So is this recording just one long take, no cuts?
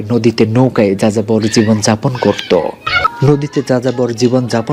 no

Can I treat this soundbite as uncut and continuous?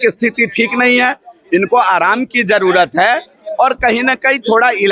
yes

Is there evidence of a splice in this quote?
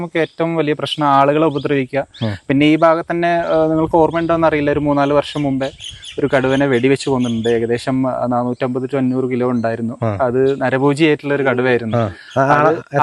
no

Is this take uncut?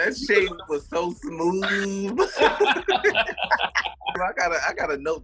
no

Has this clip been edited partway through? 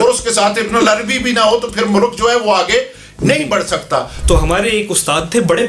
yes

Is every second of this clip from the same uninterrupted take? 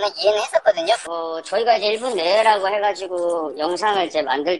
no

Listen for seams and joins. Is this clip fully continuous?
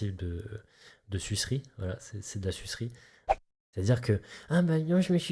no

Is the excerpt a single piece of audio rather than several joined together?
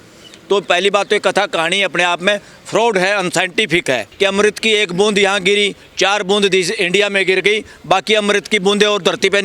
no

